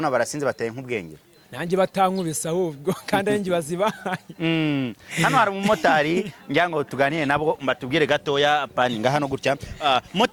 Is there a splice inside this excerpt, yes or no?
no